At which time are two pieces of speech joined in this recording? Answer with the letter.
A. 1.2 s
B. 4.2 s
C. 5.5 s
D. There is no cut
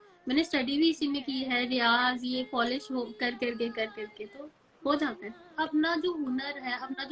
C